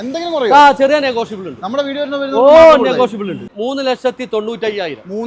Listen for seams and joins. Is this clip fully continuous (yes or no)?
no